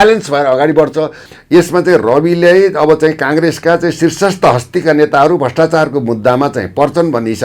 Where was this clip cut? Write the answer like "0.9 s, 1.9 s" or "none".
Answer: 1.2 s